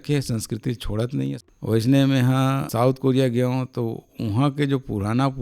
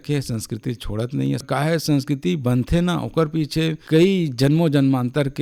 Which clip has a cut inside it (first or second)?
first